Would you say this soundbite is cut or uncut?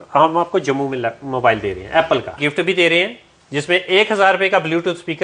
cut